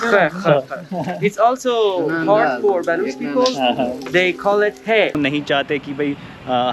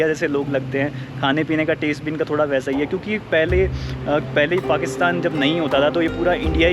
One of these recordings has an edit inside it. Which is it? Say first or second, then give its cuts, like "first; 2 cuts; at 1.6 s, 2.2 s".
first; 1 cut; at 5.1 s